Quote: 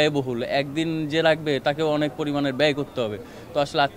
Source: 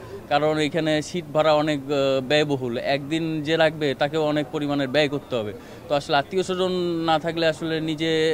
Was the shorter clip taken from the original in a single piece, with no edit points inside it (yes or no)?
yes